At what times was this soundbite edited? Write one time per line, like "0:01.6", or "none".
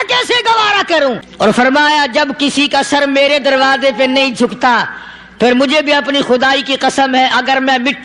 0:01.3